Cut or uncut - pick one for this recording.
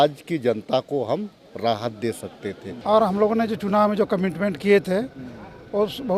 cut